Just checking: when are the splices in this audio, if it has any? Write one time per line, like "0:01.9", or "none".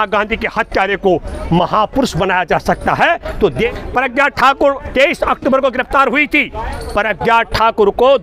0:03.5